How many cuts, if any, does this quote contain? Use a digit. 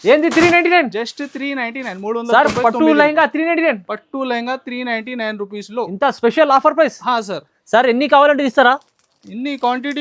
0